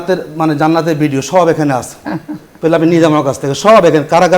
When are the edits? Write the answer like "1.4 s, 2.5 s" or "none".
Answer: none